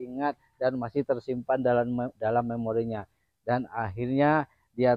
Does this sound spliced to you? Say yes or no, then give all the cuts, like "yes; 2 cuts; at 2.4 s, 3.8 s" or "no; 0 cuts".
no; 0 cuts